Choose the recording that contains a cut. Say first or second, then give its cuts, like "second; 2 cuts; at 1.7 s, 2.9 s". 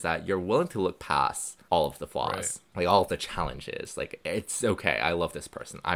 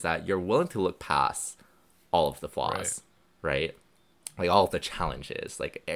first; 2 cuts; at 1.5 s, 2.6 s